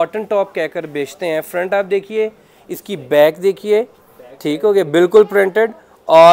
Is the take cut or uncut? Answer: uncut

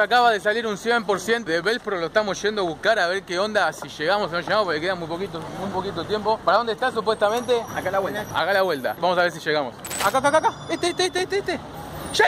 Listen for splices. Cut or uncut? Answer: cut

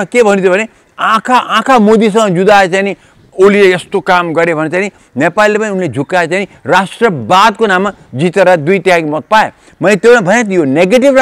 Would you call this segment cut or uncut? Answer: uncut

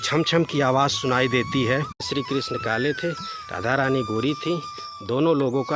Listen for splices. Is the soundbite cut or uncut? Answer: cut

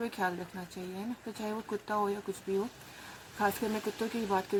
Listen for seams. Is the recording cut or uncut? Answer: uncut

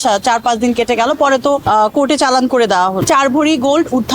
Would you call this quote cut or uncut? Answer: cut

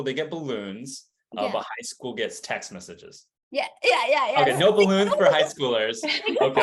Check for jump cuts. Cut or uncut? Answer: uncut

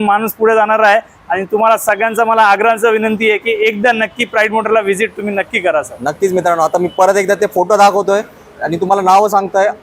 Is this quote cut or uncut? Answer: uncut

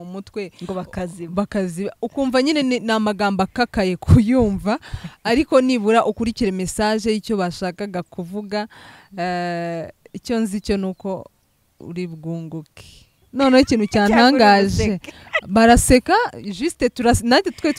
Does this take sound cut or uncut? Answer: uncut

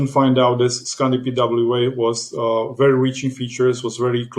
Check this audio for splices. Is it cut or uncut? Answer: uncut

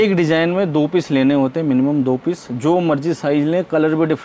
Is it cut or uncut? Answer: uncut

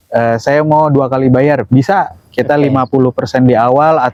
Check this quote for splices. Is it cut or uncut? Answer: uncut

